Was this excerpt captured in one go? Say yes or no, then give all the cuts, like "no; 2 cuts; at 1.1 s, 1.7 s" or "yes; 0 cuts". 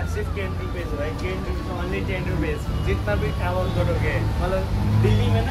yes; 0 cuts